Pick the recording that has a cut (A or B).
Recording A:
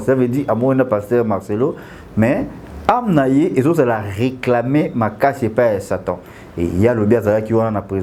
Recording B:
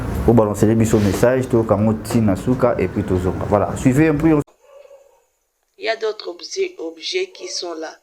B